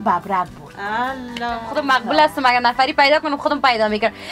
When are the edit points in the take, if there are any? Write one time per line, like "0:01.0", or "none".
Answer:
0:01.7